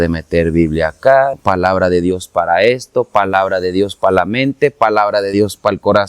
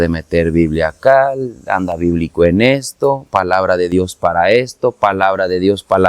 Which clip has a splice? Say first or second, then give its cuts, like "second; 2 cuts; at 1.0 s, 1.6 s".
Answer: first; 1 cut; at 1.4 s